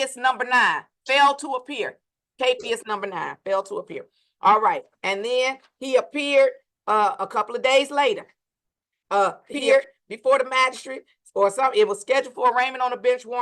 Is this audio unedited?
no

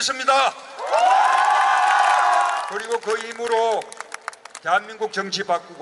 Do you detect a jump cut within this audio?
yes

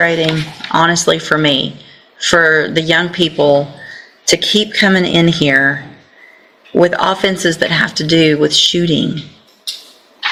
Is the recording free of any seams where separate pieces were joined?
yes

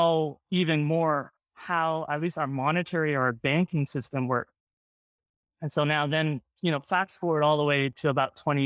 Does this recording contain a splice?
no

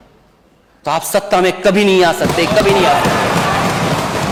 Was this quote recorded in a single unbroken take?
yes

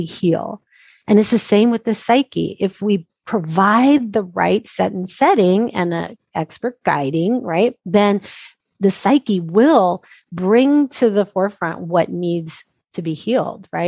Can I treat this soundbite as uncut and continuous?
no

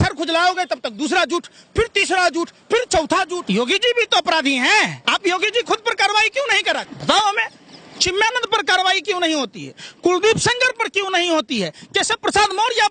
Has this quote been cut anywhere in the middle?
yes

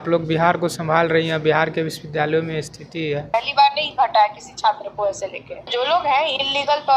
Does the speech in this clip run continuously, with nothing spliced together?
no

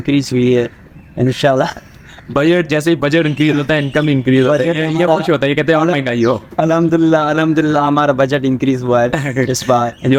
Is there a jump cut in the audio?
no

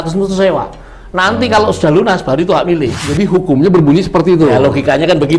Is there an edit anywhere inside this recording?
yes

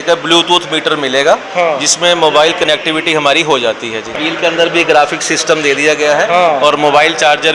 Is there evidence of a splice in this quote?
yes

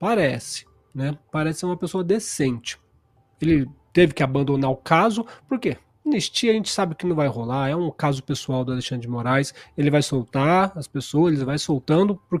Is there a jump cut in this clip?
no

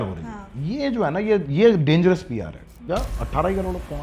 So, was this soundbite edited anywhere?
yes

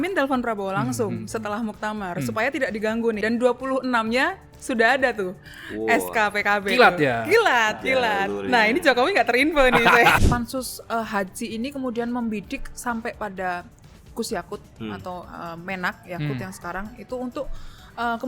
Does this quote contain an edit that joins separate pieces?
yes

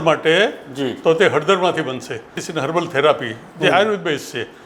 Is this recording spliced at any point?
yes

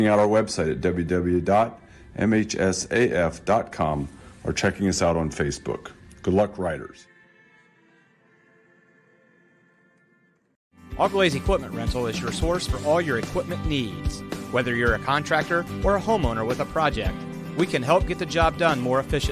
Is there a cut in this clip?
yes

